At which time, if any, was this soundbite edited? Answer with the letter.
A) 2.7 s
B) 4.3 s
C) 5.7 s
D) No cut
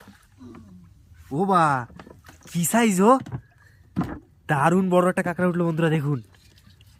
D